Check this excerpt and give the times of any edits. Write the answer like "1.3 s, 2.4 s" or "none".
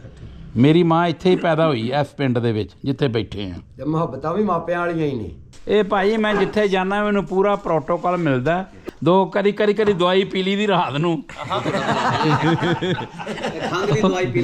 5.6 s, 8.8 s